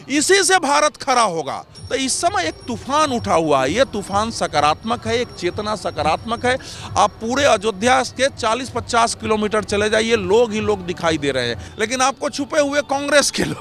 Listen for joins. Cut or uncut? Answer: cut